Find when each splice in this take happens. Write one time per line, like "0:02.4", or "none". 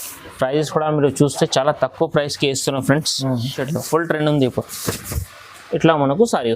0:03.6